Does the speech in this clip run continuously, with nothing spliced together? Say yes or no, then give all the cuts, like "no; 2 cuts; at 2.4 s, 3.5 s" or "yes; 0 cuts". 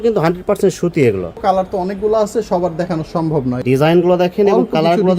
no; 2 cuts; at 1.3 s, 3.6 s